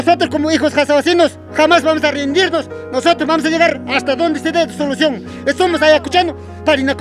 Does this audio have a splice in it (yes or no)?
no